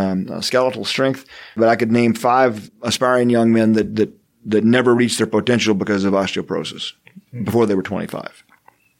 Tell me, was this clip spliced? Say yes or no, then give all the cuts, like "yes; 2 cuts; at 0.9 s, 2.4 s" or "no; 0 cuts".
yes; 2 cuts; at 1.6 s, 2.7 s